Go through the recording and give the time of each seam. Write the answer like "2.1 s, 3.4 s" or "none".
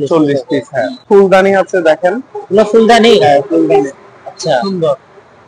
1.0 s